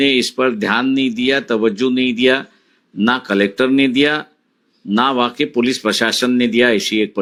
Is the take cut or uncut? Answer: uncut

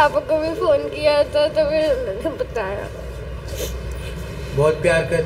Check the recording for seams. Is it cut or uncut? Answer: uncut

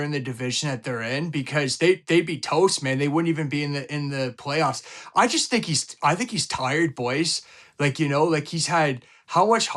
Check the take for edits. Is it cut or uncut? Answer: uncut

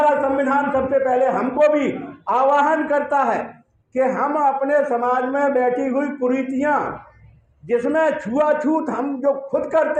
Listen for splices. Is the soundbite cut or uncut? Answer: uncut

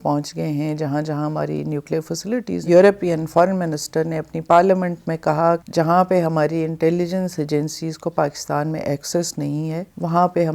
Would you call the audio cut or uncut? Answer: cut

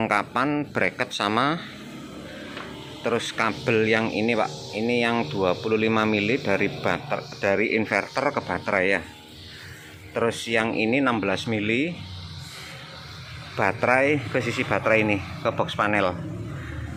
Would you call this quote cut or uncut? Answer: uncut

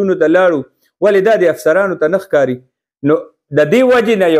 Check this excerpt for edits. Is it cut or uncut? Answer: uncut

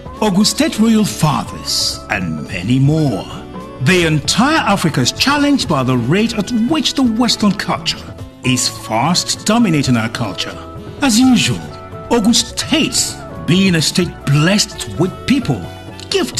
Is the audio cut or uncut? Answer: cut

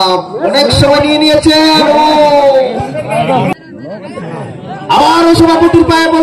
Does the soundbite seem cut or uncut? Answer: cut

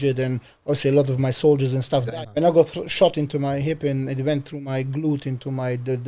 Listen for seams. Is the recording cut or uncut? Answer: cut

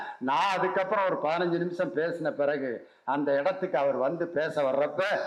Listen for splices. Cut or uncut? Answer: uncut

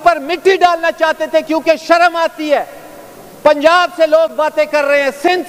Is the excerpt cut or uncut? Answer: uncut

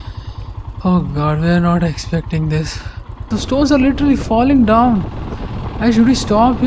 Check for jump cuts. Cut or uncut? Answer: cut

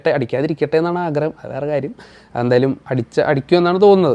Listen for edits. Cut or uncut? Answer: uncut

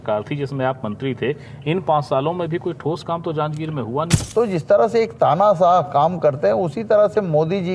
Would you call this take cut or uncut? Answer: cut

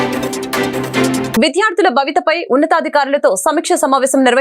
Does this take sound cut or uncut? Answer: cut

